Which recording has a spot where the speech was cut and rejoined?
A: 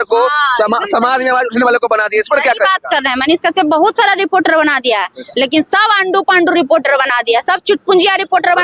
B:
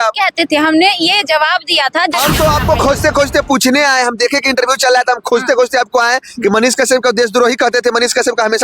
B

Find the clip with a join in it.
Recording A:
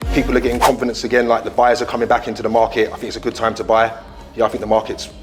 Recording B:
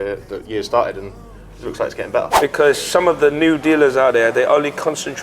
B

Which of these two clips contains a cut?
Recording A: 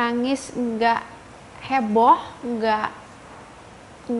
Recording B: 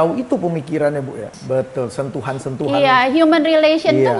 B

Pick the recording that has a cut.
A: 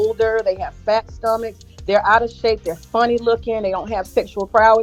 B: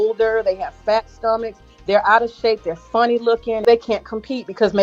B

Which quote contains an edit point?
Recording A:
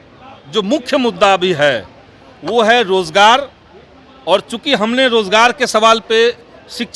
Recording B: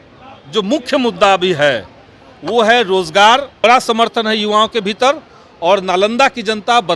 B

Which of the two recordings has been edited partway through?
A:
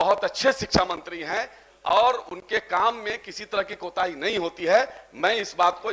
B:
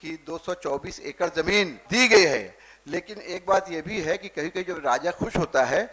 B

